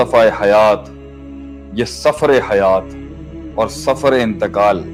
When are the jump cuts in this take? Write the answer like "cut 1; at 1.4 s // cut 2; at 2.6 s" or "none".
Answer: none